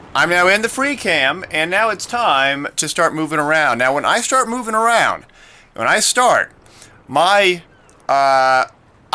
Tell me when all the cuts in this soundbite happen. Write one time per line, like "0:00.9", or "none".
0:03.6